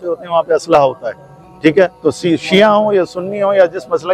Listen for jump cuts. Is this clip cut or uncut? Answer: uncut